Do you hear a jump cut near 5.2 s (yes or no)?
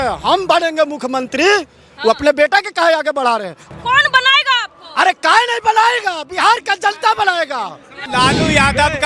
no